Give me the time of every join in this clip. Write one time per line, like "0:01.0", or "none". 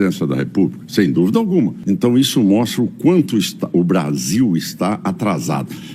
0:01.8